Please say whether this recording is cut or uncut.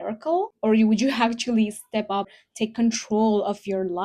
cut